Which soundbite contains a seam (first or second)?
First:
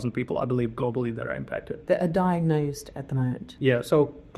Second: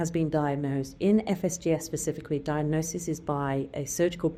first